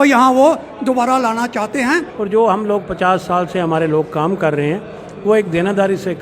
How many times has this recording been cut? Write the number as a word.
one